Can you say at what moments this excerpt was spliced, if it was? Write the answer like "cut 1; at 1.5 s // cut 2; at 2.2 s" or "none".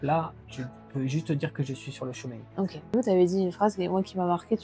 cut 1; at 2.9 s